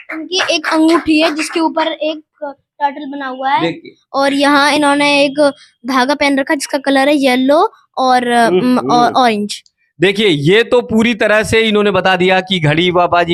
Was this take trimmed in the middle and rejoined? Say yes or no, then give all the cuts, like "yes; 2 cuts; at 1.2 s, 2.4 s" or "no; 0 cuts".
no; 0 cuts